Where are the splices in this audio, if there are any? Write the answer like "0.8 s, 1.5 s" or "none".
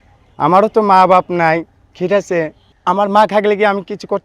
2.6 s